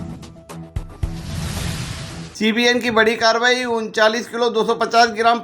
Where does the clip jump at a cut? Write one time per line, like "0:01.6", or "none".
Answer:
0:02.0